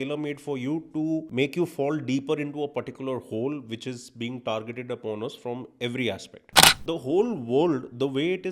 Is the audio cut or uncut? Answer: cut